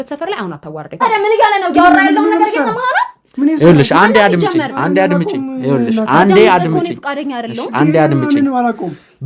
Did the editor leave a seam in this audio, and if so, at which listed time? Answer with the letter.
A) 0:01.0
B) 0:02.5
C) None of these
A